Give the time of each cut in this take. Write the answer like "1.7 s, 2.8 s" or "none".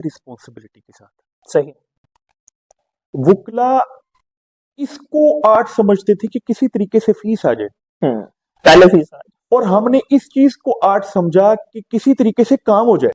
none